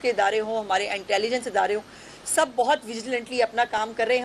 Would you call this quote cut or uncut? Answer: uncut